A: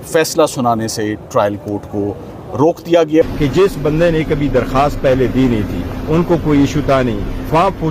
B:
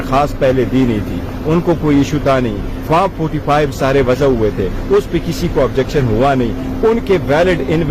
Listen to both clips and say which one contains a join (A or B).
A